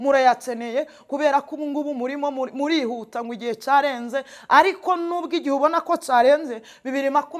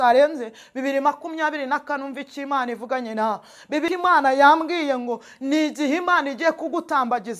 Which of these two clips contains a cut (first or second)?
second